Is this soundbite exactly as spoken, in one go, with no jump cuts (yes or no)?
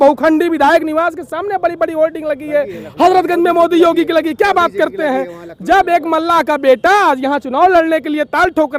yes